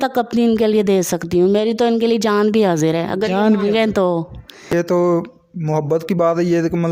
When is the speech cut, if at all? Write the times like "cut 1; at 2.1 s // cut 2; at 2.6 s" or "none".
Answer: cut 1; at 4.7 s